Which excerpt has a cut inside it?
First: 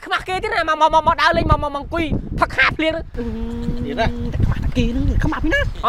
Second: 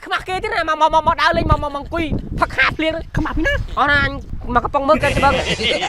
second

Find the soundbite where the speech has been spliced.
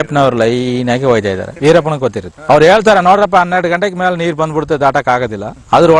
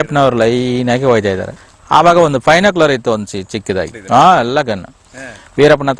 first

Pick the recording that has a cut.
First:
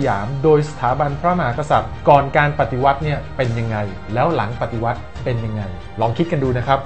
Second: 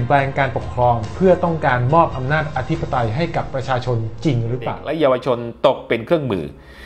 second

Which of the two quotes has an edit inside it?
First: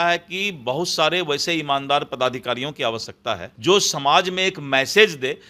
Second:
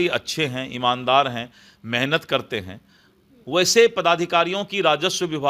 first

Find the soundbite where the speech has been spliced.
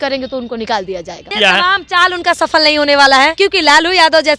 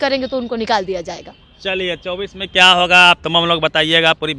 first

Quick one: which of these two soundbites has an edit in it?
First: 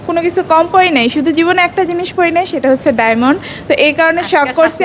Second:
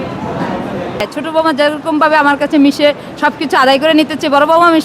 second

